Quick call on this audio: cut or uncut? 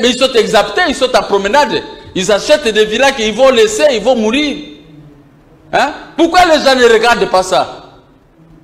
uncut